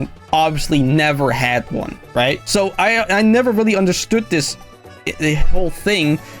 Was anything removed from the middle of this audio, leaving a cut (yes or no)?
yes